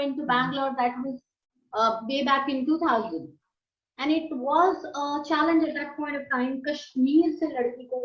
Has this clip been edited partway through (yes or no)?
no